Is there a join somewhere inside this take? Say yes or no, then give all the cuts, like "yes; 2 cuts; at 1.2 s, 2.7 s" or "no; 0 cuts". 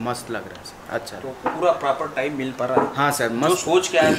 no; 0 cuts